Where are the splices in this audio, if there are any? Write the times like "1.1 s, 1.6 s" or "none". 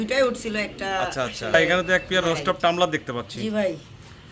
1.5 s